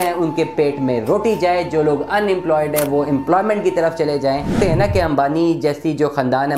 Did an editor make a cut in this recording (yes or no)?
yes